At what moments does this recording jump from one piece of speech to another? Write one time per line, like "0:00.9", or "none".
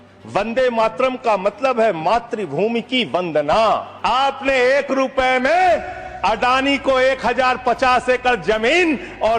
0:03.9

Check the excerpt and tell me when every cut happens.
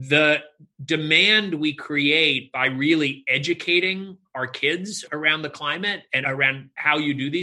0:05.0
0:06.2

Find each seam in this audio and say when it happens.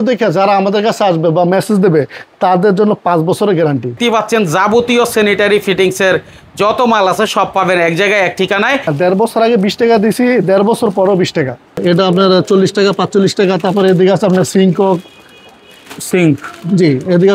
0:04.0
0:08.9
0:11.8

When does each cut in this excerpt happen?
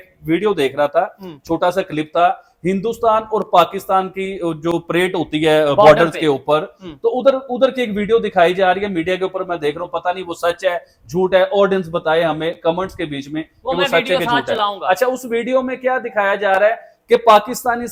none

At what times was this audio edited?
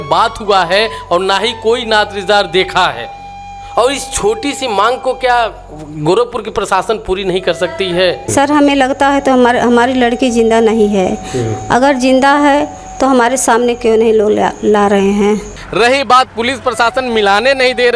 0:08.3
0:15.6

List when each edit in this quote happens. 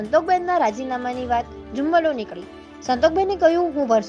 none

